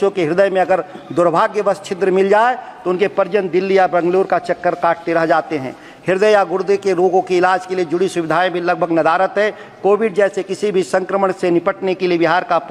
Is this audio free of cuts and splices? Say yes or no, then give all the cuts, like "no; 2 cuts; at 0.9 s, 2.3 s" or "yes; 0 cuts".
yes; 0 cuts